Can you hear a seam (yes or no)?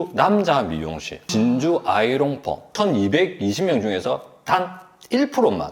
yes